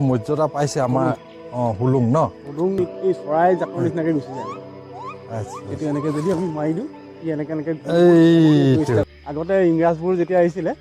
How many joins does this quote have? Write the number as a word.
two